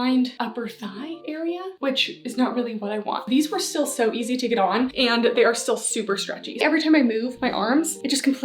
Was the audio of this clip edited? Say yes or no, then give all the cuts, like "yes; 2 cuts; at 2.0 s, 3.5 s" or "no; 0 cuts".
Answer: yes; 2 cuts; at 3.3 s, 6.6 s